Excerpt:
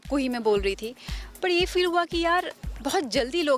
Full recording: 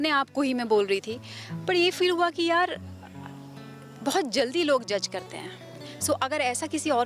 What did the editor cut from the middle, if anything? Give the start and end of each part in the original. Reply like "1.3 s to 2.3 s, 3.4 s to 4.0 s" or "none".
2.9 s to 3.9 s